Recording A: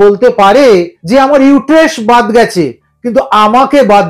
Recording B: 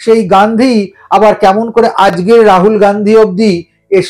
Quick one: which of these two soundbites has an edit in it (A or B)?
A